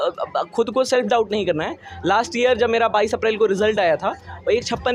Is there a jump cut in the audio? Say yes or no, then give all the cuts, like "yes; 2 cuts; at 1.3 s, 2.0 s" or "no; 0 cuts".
no; 0 cuts